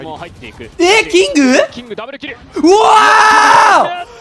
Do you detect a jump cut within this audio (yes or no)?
no